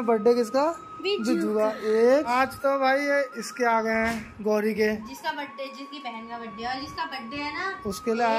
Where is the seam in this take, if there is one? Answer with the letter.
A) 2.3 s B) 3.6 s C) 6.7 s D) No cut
A